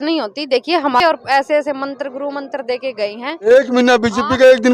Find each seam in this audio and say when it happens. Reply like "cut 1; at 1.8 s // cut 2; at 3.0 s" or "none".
cut 1; at 1.0 s // cut 2; at 3.3 s